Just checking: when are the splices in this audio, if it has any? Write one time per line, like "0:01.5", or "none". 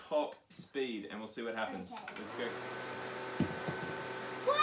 none

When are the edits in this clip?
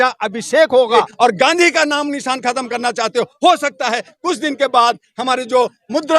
0:01.1

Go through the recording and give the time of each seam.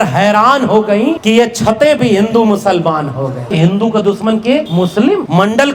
0:01.2
0:03.5
0:04.8

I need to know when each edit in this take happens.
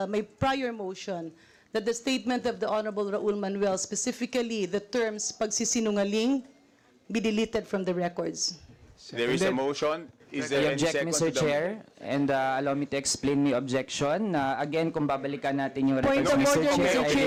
none

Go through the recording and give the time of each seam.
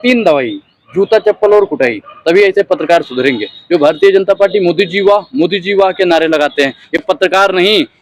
none

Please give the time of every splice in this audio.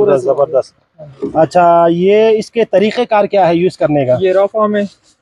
none

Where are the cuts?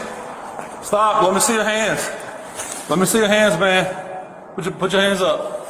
none

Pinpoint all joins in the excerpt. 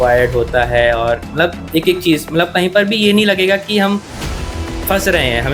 none

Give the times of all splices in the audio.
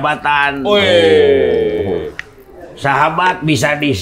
none

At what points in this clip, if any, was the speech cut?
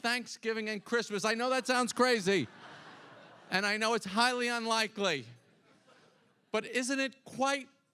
0:01.8

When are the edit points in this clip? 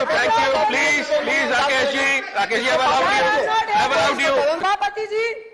0:04.6

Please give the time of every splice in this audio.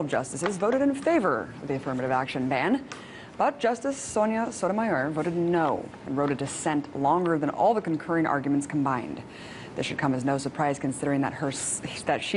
0:07.2

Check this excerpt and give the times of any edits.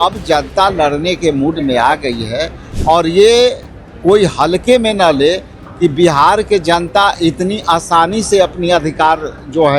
0:02.7

